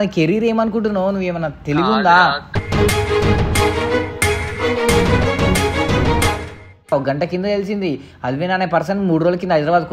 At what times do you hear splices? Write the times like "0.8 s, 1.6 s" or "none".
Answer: 6.9 s